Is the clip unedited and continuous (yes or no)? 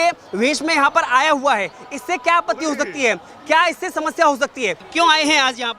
no